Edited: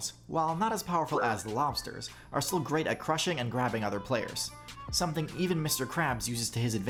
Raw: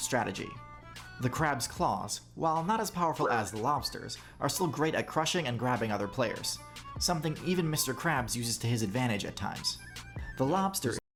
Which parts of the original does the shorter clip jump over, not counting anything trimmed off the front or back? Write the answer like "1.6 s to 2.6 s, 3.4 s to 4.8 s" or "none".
none